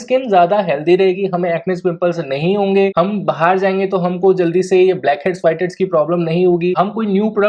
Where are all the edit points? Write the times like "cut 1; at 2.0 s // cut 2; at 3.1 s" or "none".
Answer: none